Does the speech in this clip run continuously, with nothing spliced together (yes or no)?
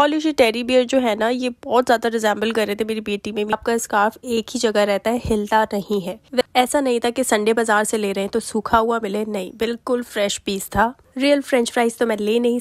no